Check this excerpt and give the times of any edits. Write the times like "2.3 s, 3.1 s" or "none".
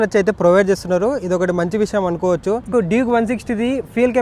2.7 s